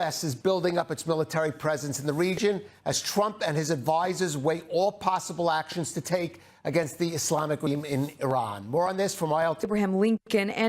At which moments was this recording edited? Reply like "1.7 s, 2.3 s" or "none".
7.7 s, 9.7 s